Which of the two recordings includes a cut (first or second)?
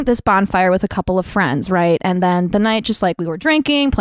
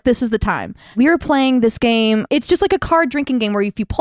second